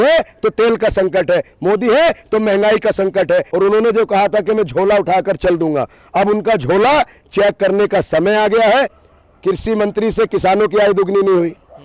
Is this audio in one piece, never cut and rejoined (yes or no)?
no